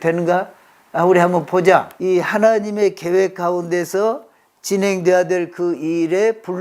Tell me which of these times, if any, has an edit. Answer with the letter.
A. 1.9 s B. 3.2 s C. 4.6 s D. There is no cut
A